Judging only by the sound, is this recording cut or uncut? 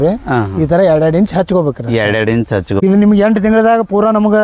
cut